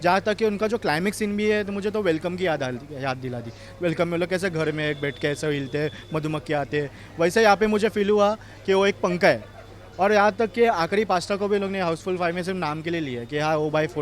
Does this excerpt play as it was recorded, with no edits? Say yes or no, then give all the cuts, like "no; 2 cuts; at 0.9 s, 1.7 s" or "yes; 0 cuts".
yes; 0 cuts